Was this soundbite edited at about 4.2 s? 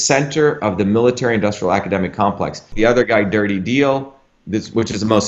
no; 1 cut; at 2.6 s

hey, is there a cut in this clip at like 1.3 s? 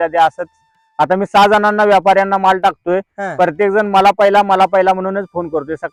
no; 0 cuts

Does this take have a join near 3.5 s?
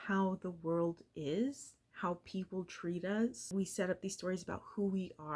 yes; 1 cut; at 3.5 s

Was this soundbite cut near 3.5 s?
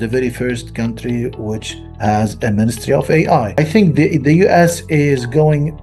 yes; 1 cut; at 3.5 s

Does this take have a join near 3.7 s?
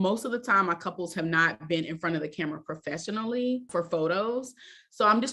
yes; 1 cut; at 3.7 s

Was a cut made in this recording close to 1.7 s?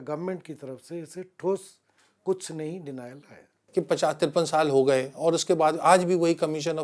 no; 1 cut; at 3.6 s

